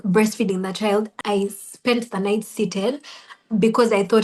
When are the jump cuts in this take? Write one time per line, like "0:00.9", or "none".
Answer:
0:01.1